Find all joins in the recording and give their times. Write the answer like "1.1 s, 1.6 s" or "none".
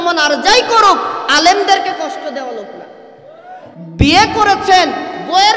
3.8 s